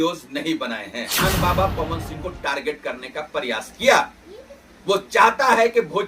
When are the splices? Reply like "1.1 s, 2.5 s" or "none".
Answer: 1.1 s